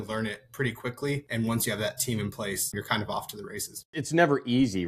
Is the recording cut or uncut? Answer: cut